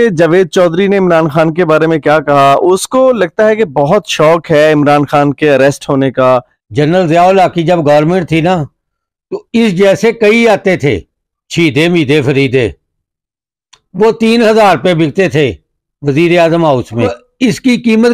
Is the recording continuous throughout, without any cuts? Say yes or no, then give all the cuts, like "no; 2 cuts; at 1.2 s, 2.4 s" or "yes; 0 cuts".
no; 2 cuts; at 6.6 s, 17.2 s